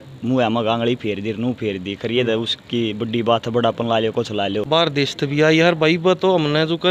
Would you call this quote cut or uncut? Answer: cut